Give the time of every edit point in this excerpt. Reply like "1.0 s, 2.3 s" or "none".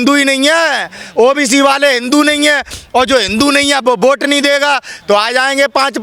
none